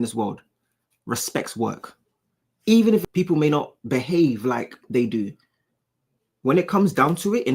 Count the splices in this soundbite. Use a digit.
1